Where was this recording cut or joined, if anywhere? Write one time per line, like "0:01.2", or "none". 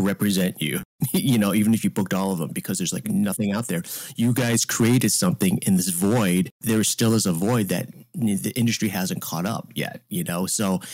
0:00.9
0:06.6